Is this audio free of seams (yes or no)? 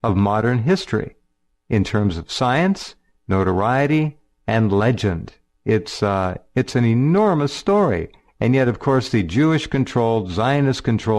no